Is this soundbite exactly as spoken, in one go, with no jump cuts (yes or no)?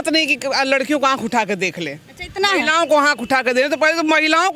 yes